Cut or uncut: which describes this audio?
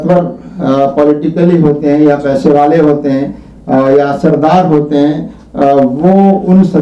uncut